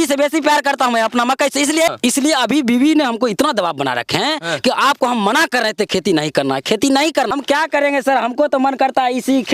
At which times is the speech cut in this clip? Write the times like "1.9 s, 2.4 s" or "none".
1.9 s, 7.3 s